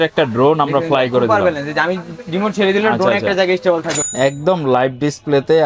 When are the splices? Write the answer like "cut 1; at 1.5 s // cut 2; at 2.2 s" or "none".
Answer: cut 1; at 4.0 s